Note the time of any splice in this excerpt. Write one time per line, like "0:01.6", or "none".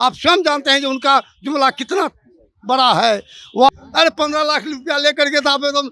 0:03.7